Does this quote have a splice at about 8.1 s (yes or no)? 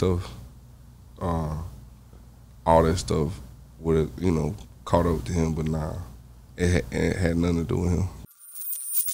yes